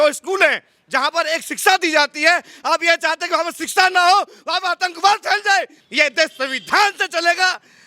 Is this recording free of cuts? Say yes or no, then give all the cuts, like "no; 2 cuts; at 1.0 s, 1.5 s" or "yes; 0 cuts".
no; 1 cut; at 5.8 s